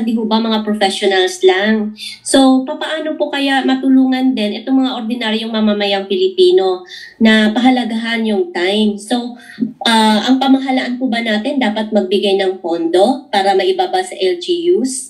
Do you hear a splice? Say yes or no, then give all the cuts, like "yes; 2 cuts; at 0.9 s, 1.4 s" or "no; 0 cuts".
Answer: no; 0 cuts